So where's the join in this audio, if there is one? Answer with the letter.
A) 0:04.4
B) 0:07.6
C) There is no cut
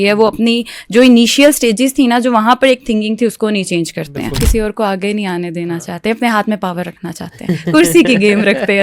A